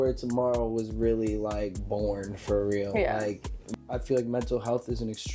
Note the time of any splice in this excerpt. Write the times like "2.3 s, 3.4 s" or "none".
3.6 s